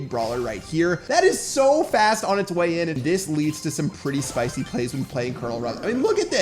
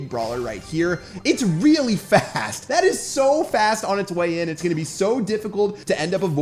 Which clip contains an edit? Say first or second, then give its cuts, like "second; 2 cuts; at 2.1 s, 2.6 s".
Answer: first; 2 cuts; at 1.0 s, 3.0 s